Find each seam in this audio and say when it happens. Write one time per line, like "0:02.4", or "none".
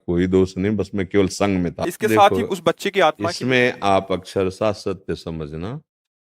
0:01.9